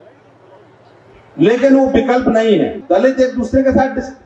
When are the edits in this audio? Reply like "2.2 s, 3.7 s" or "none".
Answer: 2.8 s